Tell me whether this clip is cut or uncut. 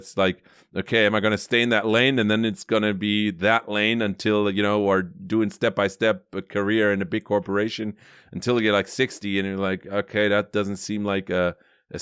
uncut